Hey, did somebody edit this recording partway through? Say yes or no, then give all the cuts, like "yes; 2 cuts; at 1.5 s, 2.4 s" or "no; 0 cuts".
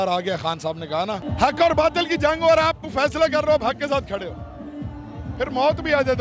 yes; 1 cut; at 1.3 s